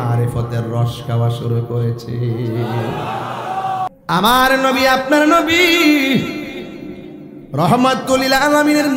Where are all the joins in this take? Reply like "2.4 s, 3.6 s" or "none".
3.9 s